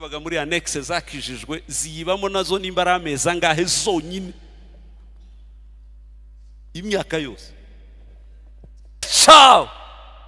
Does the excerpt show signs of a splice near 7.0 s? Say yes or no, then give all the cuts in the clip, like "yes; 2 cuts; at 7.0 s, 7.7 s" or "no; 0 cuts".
no; 1 cut; at 9.1 s